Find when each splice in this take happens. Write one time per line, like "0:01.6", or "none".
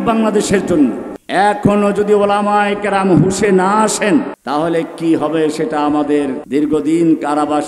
0:01.1
0:04.4
0:06.4